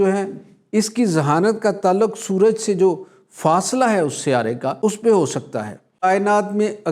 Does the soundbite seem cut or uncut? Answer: cut